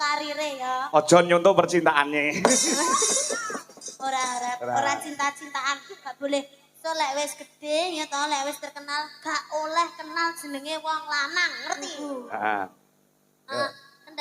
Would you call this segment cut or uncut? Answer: cut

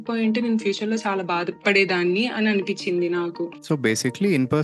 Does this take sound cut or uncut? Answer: cut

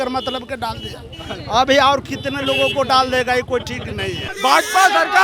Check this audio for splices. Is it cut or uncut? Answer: cut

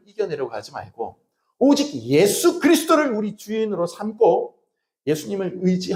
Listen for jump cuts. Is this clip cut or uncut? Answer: uncut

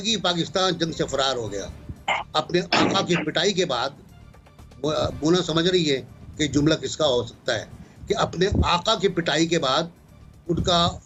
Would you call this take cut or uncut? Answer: uncut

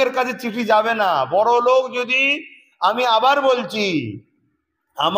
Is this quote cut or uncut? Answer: uncut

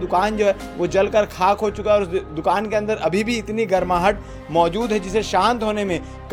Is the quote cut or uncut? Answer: uncut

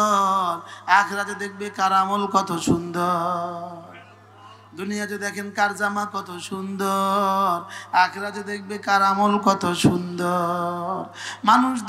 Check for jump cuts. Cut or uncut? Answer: uncut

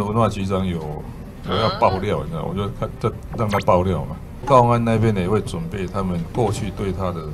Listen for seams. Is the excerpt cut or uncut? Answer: cut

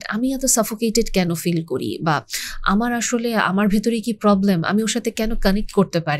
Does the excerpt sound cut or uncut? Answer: uncut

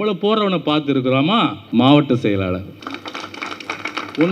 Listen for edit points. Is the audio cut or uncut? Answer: cut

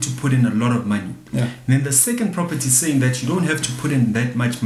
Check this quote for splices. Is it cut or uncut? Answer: uncut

